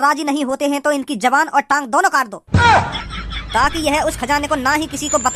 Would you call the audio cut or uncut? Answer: cut